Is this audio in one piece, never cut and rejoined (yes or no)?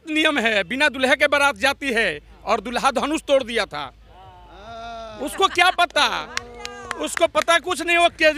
yes